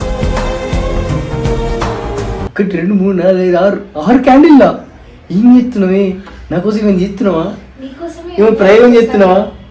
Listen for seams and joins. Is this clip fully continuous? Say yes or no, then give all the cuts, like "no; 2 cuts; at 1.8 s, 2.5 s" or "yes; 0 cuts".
no; 1 cut; at 2.4 s